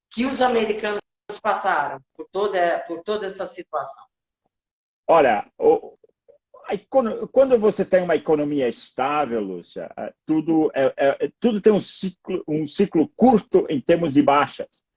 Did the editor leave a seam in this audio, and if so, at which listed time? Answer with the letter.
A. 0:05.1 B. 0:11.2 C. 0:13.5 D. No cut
A